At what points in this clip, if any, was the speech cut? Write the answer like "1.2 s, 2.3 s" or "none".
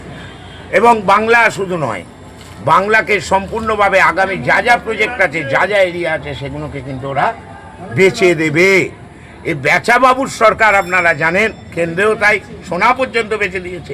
none